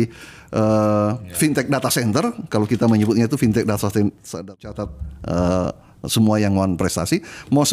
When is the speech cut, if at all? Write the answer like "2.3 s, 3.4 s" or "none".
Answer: 4.6 s